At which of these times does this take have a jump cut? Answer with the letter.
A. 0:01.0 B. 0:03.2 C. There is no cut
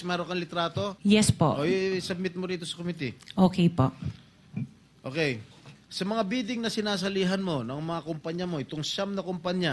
A